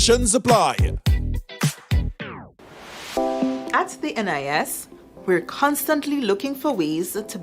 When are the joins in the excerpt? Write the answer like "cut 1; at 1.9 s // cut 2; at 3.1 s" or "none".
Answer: cut 1; at 2.5 s